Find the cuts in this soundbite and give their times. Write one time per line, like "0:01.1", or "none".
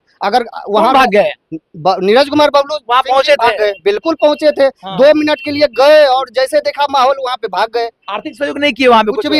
none